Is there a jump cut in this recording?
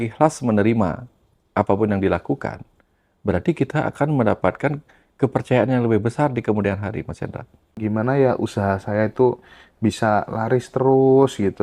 yes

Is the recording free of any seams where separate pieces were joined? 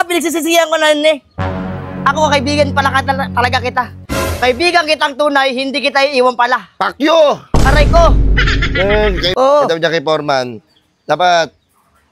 no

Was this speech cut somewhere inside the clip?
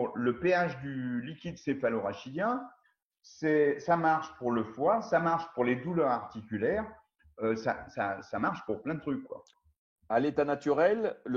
yes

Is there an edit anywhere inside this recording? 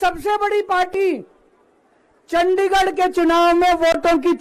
no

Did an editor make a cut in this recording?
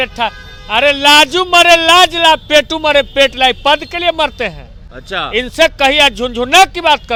no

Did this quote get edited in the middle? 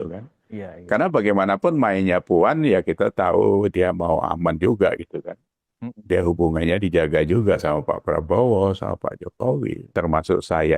yes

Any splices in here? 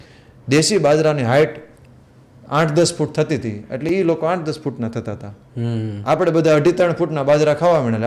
no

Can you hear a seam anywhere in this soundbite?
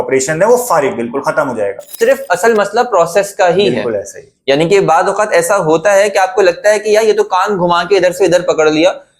yes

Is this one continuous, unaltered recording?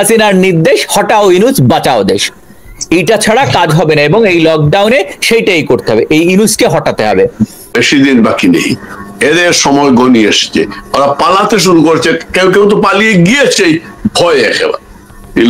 no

